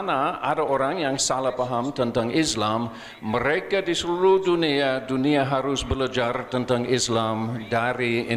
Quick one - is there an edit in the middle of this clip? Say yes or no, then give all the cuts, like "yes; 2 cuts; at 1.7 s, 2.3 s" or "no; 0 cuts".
no; 0 cuts